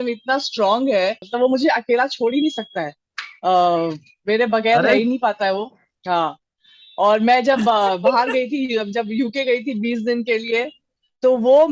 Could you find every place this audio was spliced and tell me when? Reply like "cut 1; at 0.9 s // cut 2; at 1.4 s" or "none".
cut 1; at 1.2 s